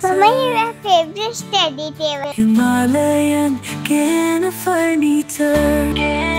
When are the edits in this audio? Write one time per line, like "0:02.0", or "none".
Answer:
0:02.3